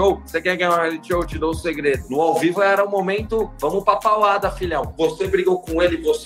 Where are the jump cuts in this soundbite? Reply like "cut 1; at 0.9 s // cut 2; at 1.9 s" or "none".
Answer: cut 1; at 2.0 s